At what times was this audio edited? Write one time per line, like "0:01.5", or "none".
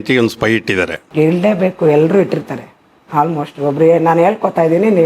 0:01.0